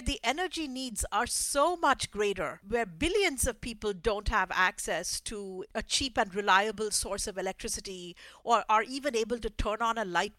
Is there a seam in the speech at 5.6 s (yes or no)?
yes